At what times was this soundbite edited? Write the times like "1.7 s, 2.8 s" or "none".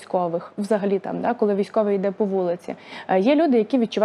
none